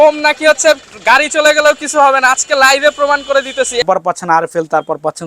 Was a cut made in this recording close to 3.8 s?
yes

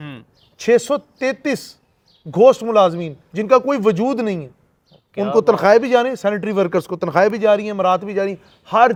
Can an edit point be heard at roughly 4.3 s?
no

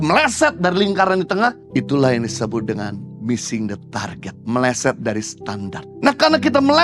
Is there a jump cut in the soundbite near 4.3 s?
yes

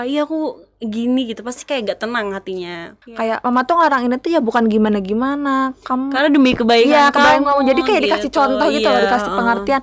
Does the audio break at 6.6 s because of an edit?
no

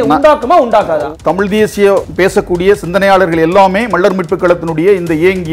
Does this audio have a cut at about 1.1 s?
yes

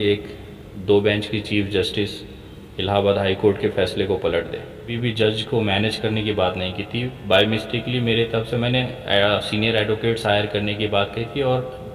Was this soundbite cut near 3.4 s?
no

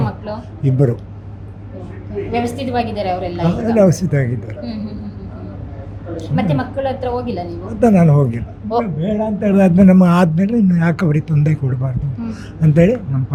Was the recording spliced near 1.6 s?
no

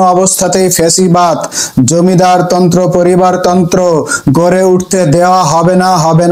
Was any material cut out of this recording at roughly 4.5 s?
no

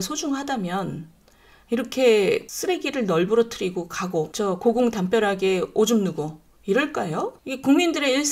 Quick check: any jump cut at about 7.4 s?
yes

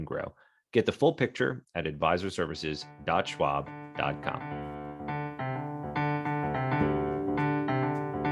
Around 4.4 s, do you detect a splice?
yes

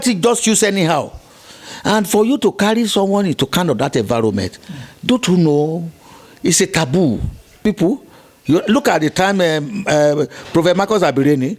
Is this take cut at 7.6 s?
yes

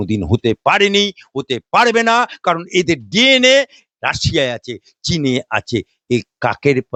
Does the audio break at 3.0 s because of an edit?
no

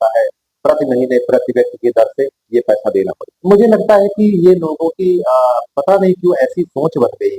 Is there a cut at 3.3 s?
yes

